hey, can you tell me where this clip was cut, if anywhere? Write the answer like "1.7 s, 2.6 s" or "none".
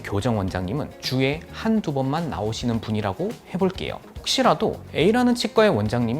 4.1 s